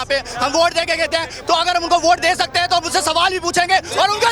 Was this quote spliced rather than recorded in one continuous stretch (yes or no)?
no